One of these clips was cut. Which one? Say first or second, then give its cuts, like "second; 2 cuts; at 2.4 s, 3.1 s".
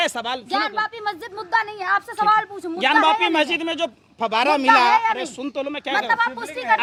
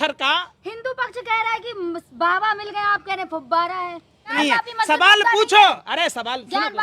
second; 1 cut; at 4.3 s